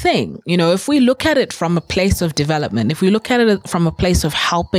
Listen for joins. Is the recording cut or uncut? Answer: uncut